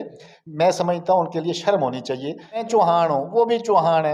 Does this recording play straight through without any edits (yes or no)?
no